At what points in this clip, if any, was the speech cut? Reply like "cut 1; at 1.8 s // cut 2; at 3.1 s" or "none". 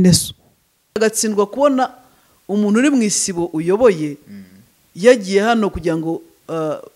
cut 1; at 1.0 s